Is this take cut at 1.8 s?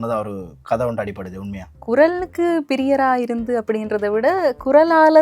no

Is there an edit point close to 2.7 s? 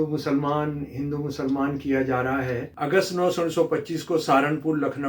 yes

